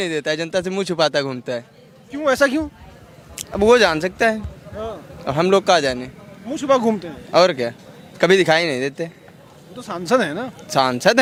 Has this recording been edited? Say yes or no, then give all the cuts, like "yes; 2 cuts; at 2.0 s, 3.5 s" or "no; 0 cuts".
no; 0 cuts